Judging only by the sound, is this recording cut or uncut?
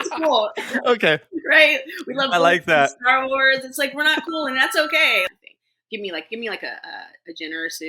cut